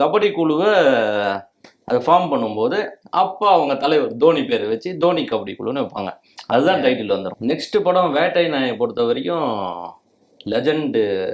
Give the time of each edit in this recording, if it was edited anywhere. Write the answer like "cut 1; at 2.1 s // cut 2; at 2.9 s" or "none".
cut 1; at 7.3 s